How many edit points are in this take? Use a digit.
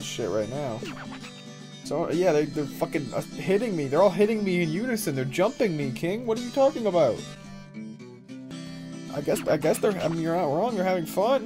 0